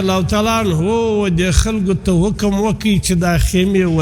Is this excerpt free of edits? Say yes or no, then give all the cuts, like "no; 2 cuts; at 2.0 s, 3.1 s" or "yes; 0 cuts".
yes; 0 cuts